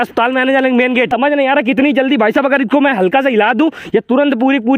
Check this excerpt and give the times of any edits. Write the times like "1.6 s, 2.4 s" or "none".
1.1 s